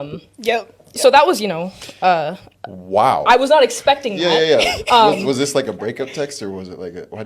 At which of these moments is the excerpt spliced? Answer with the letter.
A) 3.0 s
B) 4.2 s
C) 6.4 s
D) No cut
B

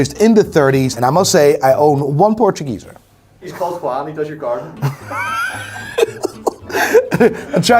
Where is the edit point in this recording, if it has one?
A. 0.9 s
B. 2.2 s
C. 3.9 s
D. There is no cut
A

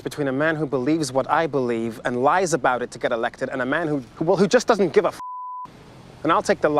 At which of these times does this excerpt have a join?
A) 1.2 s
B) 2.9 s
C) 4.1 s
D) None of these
C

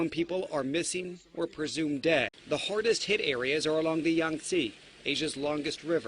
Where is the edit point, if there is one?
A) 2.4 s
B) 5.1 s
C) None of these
A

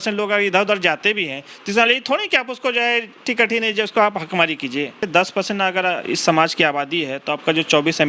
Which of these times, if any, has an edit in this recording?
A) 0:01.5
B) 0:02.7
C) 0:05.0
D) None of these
C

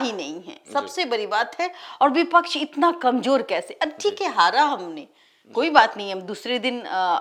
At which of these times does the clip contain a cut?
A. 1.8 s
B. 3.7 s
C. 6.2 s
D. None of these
D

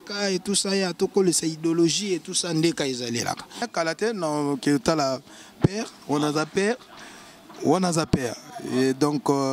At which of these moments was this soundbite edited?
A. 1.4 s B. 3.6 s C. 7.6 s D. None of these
B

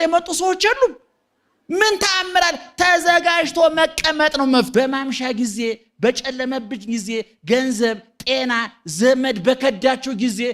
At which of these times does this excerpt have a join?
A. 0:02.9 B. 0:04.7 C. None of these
B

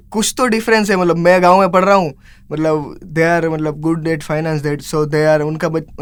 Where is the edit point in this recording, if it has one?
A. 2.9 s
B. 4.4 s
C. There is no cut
C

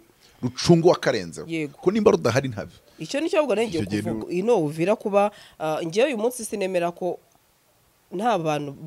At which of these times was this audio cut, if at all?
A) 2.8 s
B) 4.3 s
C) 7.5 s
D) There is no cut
B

